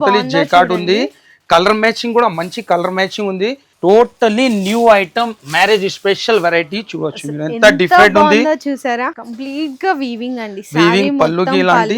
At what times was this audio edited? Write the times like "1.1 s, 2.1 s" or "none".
3.7 s, 9.1 s

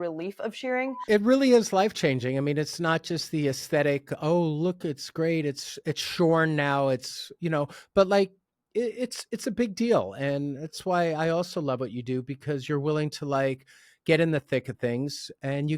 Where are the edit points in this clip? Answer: 1.0 s

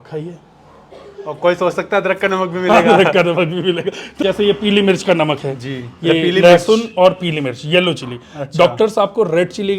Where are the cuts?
4.2 s

